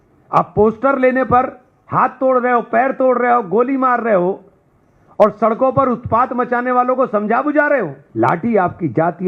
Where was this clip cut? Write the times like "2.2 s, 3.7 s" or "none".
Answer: 8.0 s